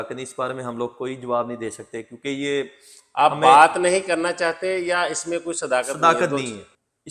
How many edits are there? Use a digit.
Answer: 0